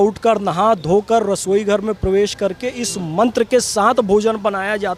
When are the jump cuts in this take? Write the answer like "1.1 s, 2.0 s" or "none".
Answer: none